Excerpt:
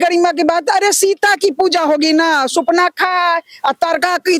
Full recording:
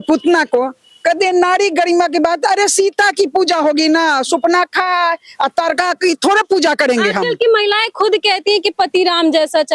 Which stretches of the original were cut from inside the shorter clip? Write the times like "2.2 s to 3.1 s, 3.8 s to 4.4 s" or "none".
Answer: none